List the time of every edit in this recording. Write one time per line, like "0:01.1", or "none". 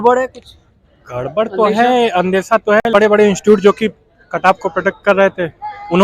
0:02.9